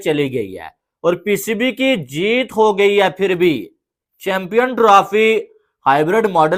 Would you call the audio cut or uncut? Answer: uncut